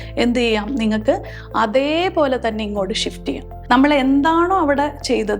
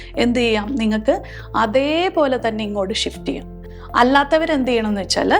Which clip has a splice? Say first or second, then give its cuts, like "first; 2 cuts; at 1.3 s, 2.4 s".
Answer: first; 1 cut; at 3.5 s